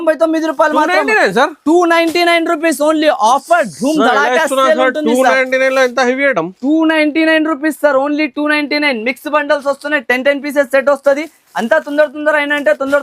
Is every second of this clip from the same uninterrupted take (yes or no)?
yes